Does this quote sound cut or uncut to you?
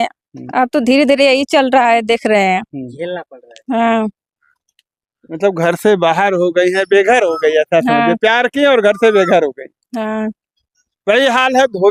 uncut